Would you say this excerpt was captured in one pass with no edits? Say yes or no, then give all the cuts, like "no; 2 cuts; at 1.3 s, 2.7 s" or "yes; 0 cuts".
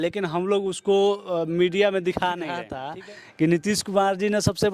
no; 1 cut; at 2.7 s